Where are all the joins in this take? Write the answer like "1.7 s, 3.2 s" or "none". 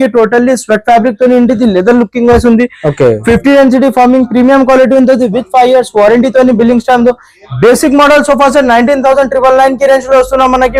none